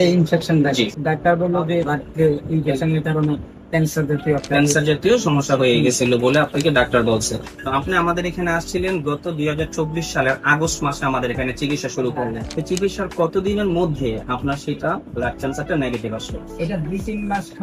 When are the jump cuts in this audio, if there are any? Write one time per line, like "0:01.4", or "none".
0:01.0
0:01.9
0:07.5
0:12.4